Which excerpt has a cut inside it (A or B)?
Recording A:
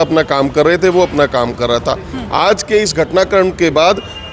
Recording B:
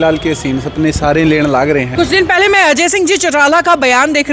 B